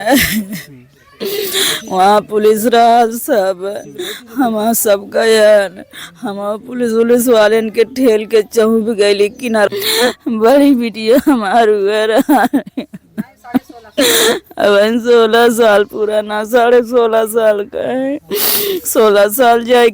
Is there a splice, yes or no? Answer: yes